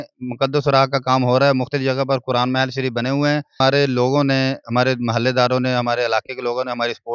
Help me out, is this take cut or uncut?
cut